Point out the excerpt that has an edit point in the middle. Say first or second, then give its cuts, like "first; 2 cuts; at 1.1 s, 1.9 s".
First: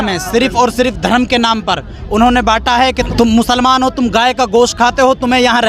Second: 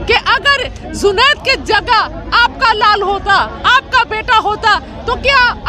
first; 1 cut; at 3.0 s